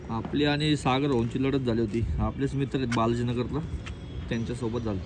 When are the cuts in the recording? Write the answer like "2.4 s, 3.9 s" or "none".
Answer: none